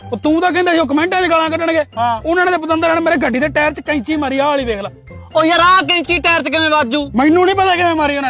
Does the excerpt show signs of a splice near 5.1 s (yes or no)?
yes